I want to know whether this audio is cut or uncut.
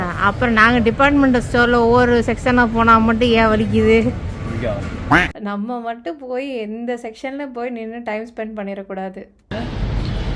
uncut